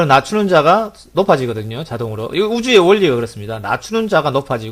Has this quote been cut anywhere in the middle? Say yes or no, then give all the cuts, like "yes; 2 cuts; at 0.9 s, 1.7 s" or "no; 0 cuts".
no; 0 cuts